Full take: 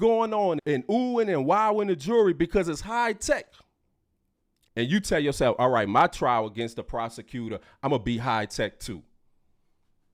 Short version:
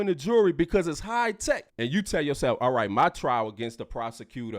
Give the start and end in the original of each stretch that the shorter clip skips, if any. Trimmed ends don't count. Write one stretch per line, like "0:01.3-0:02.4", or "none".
0:03.5-0:04.7